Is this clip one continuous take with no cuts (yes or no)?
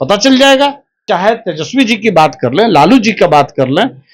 no